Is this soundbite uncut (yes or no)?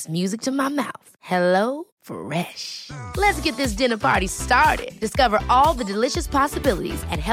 yes